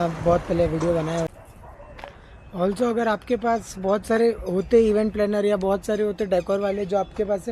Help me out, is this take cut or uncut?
cut